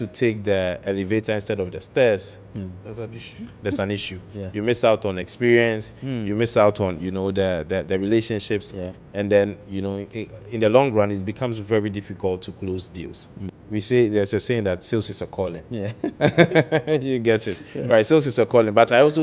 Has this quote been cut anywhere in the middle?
yes; 1 cut; at 13.5 s

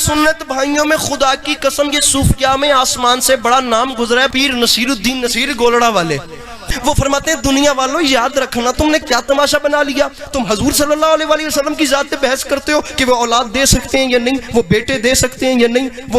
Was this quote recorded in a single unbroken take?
no; 2 cuts; at 4.3 s, 6.6 s

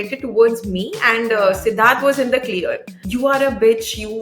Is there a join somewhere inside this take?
yes; 1 cut; at 2.9 s

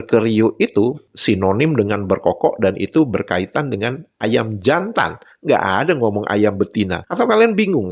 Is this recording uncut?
yes; 0 cuts

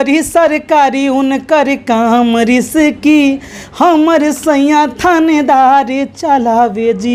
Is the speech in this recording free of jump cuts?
yes; 0 cuts

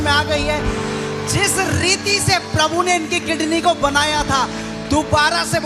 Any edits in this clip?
no; 0 cuts

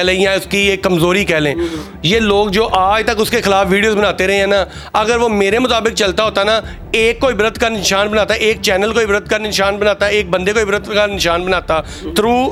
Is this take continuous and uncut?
yes; 0 cuts

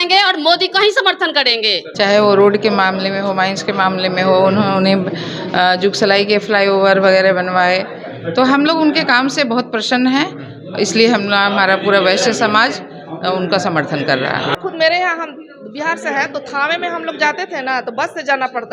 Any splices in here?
yes; 2 cuts; at 1.8 s, 14.5 s

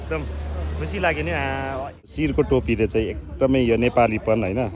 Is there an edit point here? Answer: yes; 1 cut; at 2.1 s

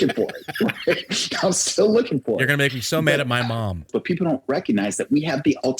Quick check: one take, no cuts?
no; 1 cut; at 3.9 s

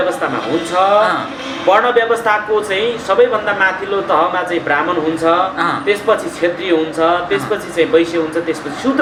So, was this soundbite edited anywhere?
no; 0 cuts

